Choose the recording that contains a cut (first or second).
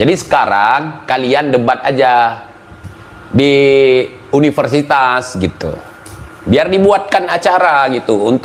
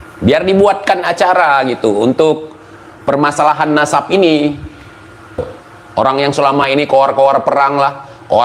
second